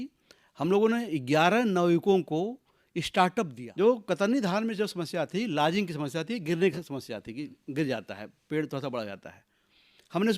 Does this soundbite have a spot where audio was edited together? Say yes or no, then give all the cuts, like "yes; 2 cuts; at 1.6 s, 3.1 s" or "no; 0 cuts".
yes; 1 cut; at 3.6 s